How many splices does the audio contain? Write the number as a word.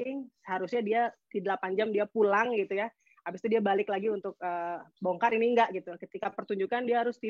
zero